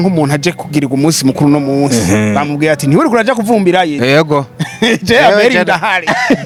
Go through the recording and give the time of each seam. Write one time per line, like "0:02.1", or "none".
none